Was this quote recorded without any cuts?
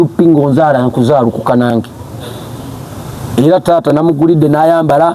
yes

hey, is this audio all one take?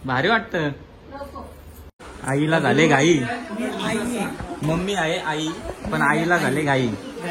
no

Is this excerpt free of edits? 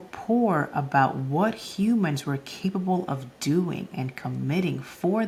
yes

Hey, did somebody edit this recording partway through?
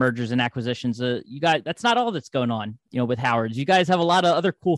yes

